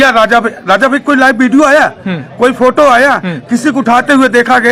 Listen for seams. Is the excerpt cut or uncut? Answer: uncut